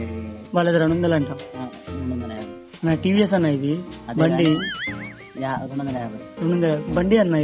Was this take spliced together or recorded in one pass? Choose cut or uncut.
uncut